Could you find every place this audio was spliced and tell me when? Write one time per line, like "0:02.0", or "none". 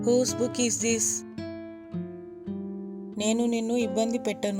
0:01.3
0:03.1